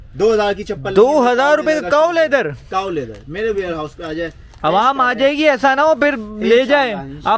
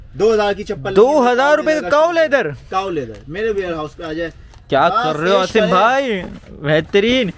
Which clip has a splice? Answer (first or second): first